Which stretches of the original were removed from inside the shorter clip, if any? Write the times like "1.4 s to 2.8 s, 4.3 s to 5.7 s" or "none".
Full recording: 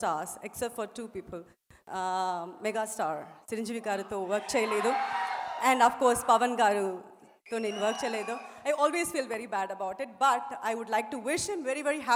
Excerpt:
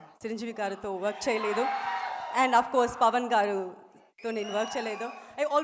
none